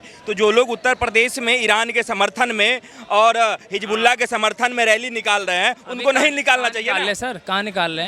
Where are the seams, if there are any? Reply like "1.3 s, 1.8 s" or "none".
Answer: none